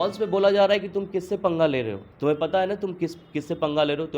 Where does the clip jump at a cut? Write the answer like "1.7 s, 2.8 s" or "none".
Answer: 2.1 s